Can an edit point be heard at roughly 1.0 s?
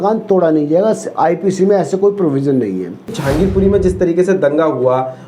no; 1 cut; at 3.2 s

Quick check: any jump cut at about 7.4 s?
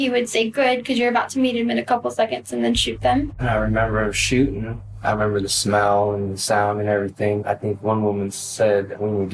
yes; 2 cuts; at 3.4 s, 7.4 s

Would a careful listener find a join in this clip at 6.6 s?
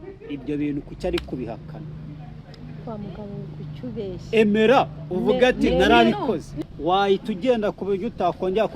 yes; 1 cut; at 6.6 s

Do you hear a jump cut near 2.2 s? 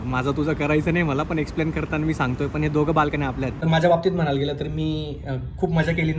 no; 1 cut; at 3.6 s

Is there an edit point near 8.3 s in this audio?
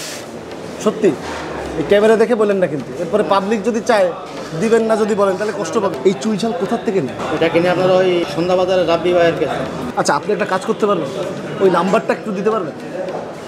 yes; 3 cuts; at 6.0 s, 7.2 s, 8.3 s

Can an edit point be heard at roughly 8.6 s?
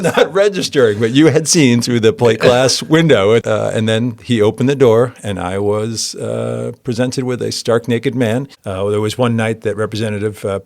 yes; 2 cuts; at 3.4 s, 8.6 s

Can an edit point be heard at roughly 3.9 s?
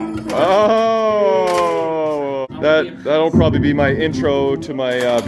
no; 1 cut; at 2.5 s

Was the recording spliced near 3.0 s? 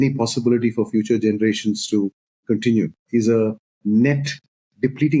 yes; 1 cut; at 3.0 s

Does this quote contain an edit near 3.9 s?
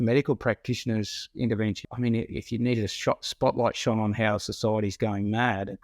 no; 1 cut; at 1.8 s

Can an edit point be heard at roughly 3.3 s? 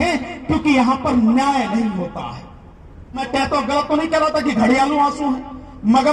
yes; 1 cut; at 3.3 s

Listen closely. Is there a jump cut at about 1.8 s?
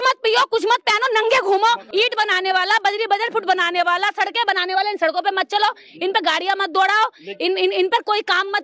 yes; 1 cut; at 1.8 s

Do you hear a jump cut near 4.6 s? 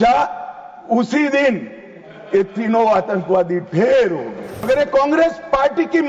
yes; 1 cut; at 4.6 s

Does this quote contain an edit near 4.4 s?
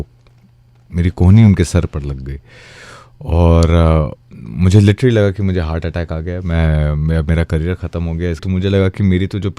no; 1 cut; at 8.4 s

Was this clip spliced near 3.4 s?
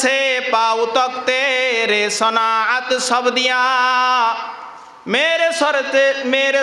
no; 0 cuts

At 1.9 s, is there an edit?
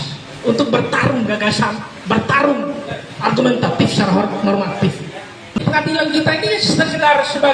no; 1 cut; at 5.6 s

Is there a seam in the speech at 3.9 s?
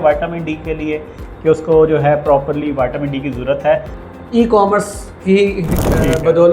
yes; 1 cut; at 3.9 s

